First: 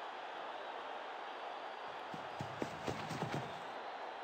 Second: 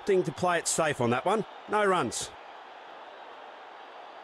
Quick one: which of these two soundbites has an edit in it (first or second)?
second